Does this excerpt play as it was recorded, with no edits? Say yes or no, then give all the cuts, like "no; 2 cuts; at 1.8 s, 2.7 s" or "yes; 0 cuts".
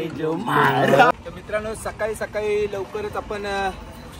no; 1 cut; at 1.1 s